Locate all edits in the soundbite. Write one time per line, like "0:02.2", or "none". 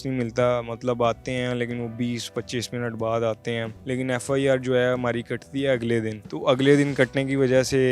0:03.7
0:06.2